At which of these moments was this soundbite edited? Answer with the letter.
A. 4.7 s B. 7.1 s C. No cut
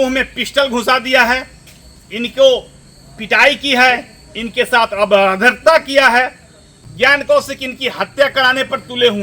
B